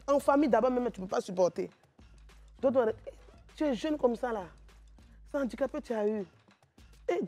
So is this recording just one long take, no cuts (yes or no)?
yes